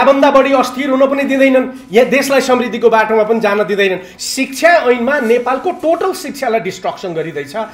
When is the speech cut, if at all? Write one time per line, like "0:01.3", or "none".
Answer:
0:04.1